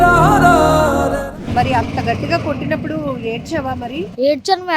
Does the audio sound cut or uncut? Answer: cut